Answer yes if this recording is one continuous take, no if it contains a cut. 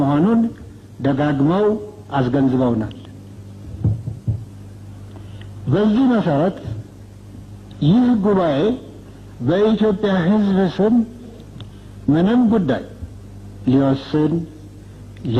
yes